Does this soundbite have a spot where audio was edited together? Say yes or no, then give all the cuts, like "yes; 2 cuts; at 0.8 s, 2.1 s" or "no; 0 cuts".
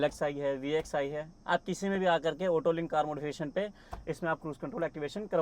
no; 0 cuts